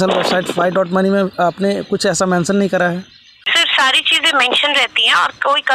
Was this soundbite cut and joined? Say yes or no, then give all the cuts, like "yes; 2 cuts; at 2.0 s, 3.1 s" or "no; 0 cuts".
yes; 1 cut; at 3.6 s